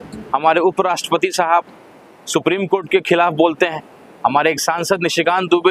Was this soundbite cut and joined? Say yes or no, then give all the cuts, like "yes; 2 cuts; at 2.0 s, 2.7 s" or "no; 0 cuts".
no; 0 cuts